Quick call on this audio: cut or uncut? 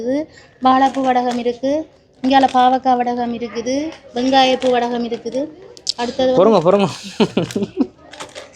uncut